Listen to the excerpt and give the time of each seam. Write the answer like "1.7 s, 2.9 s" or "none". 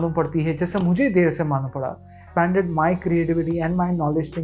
2.2 s